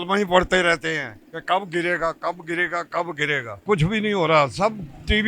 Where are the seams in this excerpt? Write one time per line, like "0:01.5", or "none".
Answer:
0:03.6